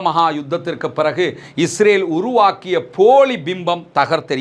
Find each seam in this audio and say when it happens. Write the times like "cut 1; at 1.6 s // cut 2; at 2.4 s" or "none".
none

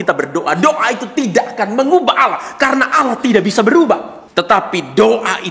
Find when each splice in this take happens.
cut 1; at 4.2 s

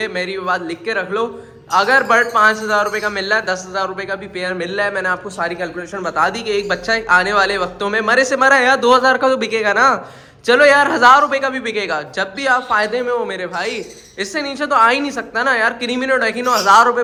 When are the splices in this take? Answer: none

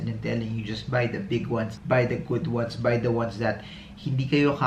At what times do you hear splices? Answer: cut 1; at 1.8 s

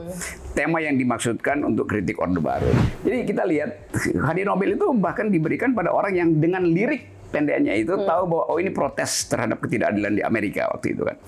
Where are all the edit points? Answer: cut 1; at 2.8 s

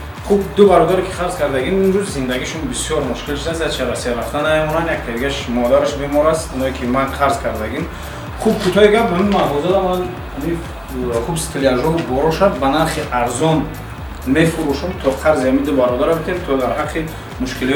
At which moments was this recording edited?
none

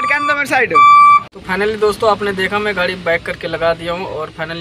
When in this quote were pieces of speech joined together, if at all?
cut 1; at 1.4 s

